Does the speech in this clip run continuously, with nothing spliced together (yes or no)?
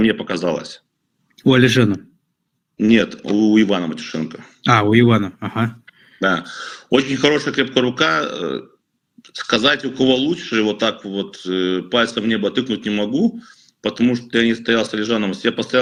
yes